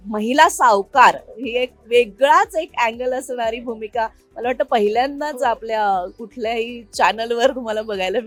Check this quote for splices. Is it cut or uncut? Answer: uncut